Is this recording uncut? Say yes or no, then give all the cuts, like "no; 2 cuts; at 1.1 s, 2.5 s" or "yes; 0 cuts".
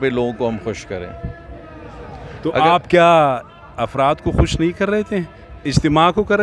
yes; 0 cuts